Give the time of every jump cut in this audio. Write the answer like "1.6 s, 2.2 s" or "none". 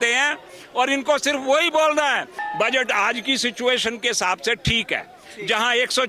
2.4 s